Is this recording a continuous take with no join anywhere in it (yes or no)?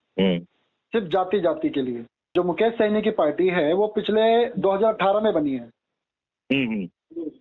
no